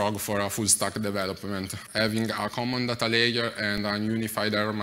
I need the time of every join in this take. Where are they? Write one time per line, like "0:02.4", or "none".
0:01.8